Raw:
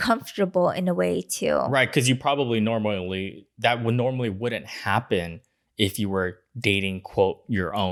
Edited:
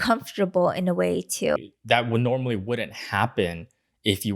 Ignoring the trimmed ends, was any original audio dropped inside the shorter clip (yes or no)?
yes